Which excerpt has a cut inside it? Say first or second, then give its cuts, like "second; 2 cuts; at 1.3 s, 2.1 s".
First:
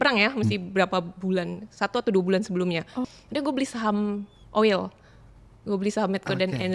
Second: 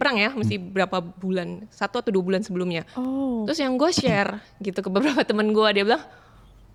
first; 1 cut; at 3.0 s